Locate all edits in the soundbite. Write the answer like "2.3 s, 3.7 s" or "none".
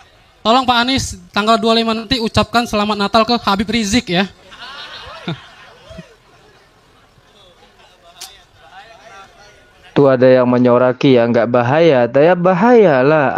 9.9 s

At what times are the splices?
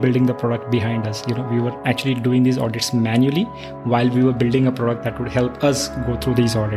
none

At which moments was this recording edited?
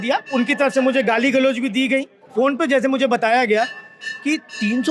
2.2 s

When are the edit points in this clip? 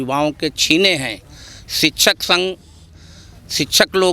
none

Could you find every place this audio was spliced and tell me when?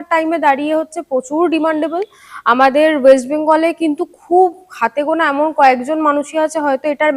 none

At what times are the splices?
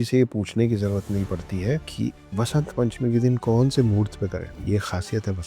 1.9 s, 4.5 s

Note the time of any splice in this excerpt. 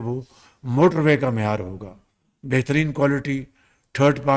none

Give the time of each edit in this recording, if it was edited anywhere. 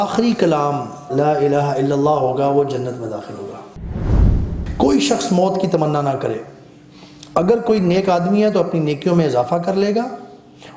1.0 s, 4.1 s

